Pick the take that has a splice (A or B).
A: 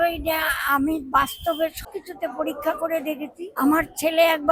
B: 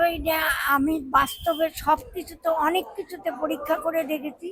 A